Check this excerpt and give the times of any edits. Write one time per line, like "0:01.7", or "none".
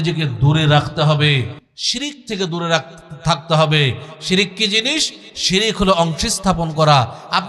none